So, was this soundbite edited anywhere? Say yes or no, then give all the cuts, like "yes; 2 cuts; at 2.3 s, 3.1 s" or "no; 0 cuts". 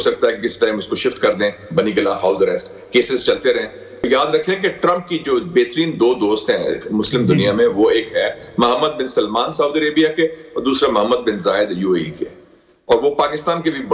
yes; 1 cut; at 4.0 s